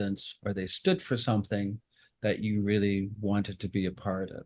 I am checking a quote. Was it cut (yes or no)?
no